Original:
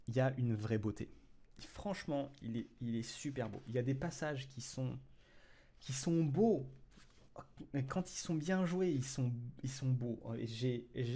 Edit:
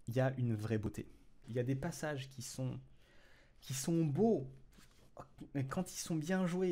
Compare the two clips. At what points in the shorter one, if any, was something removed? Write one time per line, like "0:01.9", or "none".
0:01.4